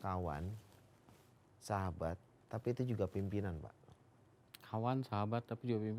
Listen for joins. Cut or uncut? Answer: uncut